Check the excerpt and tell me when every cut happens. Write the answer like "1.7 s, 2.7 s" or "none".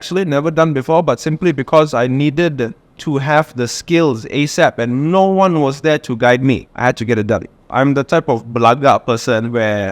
6.7 s, 7.6 s